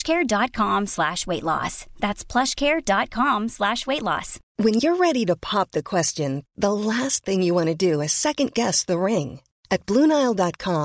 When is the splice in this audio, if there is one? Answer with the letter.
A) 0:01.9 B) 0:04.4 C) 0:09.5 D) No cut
B